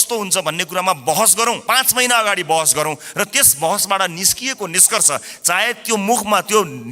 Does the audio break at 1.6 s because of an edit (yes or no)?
yes